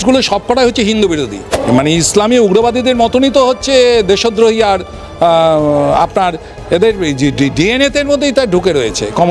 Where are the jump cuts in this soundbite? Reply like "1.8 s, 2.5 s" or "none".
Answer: 1.5 s